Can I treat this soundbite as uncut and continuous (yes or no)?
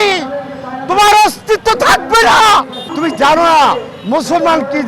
no